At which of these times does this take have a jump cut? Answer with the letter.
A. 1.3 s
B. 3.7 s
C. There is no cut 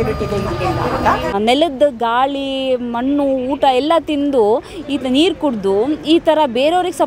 A